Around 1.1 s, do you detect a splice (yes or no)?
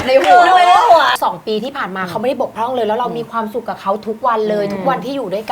yes